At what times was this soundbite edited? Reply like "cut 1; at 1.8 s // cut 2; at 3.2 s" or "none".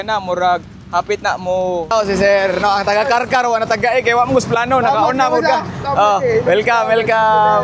cut 1; at 1.9 s

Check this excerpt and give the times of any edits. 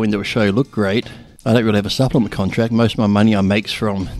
none

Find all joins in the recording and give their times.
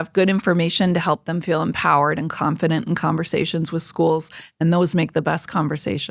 none

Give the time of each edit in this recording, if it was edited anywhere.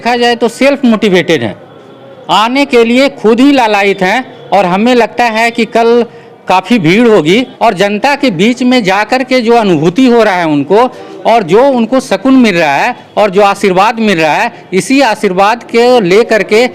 cut 1; at 7.5 s

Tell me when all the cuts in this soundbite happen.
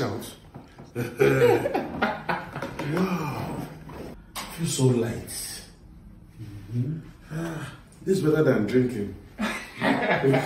cut 1; at 4.1 s

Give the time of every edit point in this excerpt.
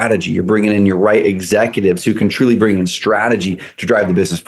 none

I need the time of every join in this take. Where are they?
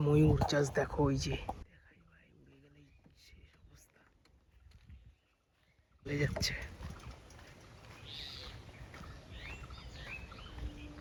none

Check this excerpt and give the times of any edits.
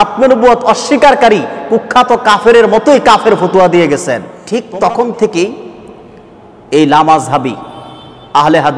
cut 1; at 4.3 s

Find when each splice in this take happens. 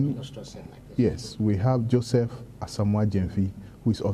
none

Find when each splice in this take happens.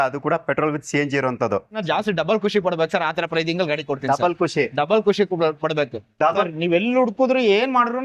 cut 1; at 1.8 s // cut 2; at 6.4 s

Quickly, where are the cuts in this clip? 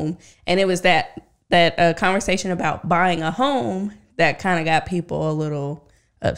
none

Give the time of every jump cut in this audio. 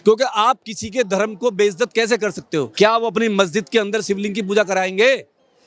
cut 1; at 2.7 s

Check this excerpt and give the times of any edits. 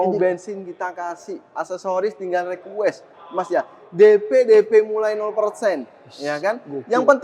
none

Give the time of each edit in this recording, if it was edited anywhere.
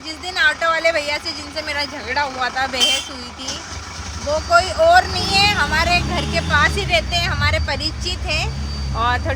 none

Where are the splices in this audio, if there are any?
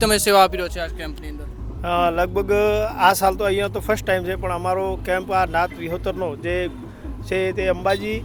none

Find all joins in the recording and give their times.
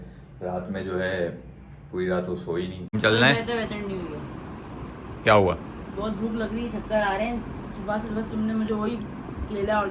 cut 1; at 2.9 s

